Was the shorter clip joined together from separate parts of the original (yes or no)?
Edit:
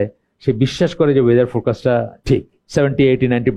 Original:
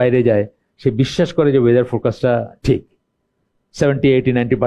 yes